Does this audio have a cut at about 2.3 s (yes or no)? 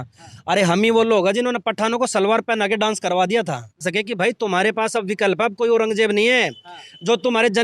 no